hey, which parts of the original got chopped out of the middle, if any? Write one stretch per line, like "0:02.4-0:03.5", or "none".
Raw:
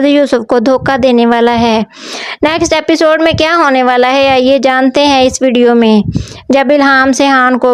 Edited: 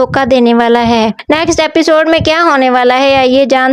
0:01.9-0:02.3

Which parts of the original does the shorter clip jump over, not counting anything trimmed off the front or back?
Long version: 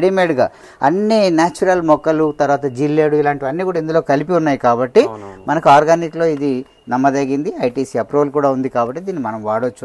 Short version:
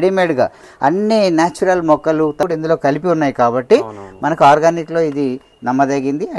0:02.4-0:03.7

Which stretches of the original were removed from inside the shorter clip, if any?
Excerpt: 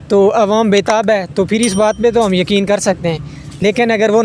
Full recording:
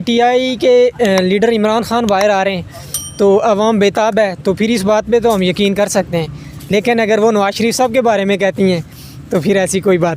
none

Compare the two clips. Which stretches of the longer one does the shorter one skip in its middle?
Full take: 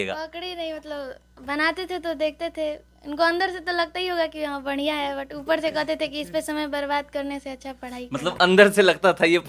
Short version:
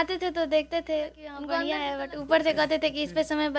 0:03.1-0:04.6

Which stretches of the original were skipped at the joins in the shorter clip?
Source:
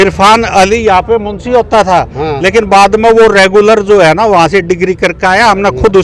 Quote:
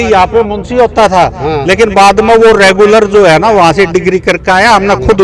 none

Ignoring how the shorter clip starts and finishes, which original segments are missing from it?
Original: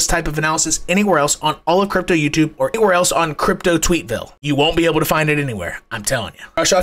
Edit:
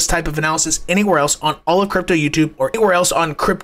none

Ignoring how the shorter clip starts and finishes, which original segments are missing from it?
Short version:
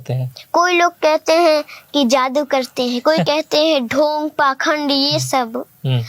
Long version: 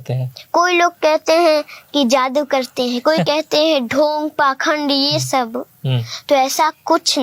none

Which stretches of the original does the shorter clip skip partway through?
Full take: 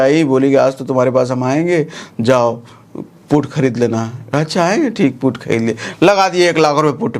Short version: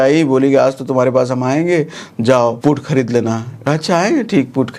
0:02.6-0:03.2

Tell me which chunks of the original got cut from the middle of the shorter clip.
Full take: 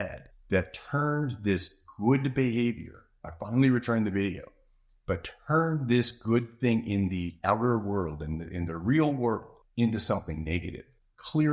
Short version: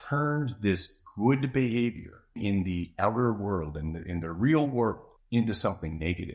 0:03.2-0:06.9

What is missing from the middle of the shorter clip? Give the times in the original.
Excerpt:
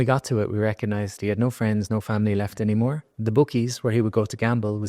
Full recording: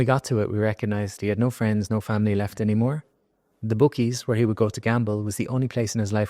0:03.1-0:03.5

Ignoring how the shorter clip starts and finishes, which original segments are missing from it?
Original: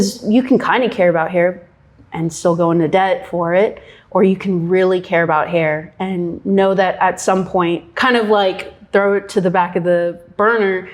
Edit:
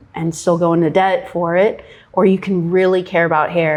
none

